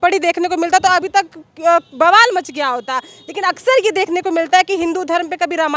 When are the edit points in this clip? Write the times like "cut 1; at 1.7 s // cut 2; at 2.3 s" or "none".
none

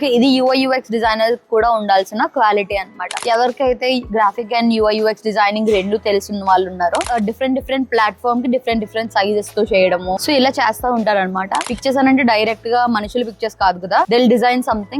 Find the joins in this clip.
cut 1; at 3.2 s // cut 2; at 7.1 s // cut 3; at 11.6 s

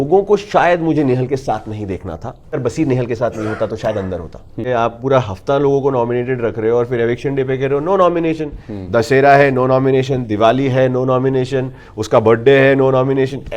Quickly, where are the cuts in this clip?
cut 1; at 2.5 s // cut 2; at 4.7 s

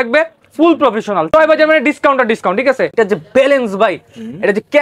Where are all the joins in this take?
cut 1; at 1.3 s // cut 2; at 2.9 s

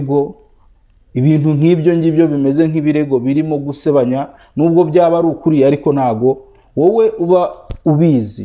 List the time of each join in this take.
none

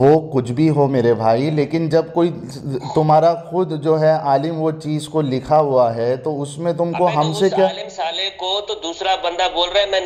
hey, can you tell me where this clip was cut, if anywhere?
none

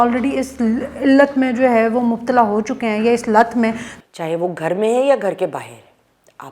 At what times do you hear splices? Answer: cut 1; at 3.9 s

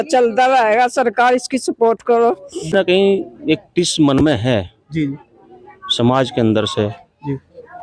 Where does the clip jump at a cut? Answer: cut 1; at 2.7 s

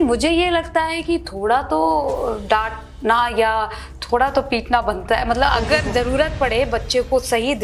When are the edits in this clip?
none

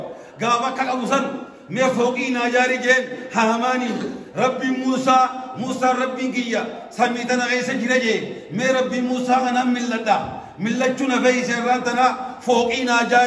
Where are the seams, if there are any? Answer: none

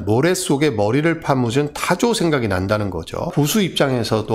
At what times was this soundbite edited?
cut 1; at 3.3 s

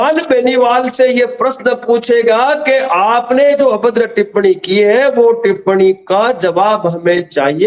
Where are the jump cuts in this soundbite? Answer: none

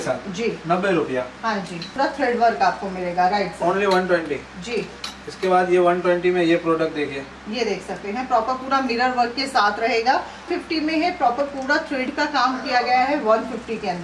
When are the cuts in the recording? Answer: cut 1; at 1.9 s // cut 2; at 10.5 s

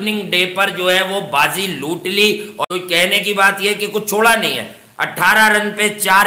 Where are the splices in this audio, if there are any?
cut 1; at 2.6 s

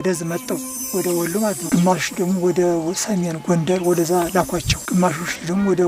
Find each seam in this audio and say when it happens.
cut 1; at 1.6 s // cut 2; at 4.7 s

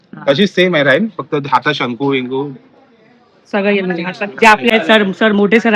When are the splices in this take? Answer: cut 1; at 4.7 s

